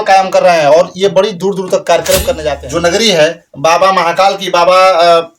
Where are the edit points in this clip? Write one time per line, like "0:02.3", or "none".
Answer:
0:02.5